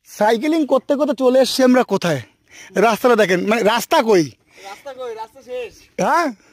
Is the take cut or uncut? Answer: uncut